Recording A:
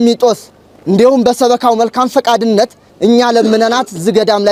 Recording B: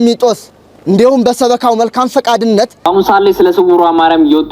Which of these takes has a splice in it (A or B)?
B